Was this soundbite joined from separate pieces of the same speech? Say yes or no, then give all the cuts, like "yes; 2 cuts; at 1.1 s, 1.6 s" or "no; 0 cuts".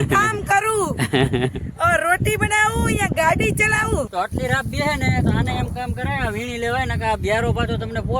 yes; 1 cut; at 4.1 s